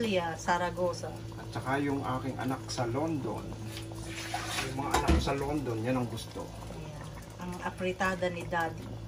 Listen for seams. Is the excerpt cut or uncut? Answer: uncut